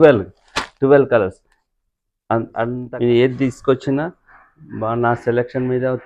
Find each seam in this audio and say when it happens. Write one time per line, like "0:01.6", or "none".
0:02.8